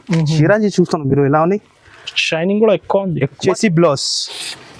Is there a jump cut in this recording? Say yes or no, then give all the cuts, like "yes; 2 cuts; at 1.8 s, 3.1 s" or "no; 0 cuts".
yes; 1 cut; at 3.4 s